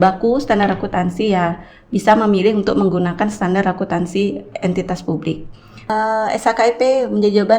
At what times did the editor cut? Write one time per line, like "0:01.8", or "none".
0:05.9